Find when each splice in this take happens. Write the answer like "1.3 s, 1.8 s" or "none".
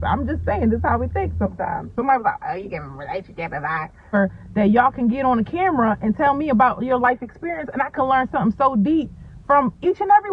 1.9 s, 4.1 s